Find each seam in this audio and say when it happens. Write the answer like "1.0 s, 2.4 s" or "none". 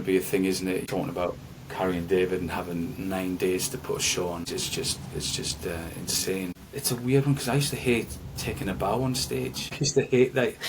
0.8 s, 4.5 s, 6.6 s, 9.8 s